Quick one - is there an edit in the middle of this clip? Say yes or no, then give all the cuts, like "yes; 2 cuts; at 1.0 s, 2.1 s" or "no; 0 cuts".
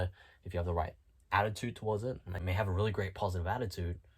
yes; 1 cut; at 2.4 s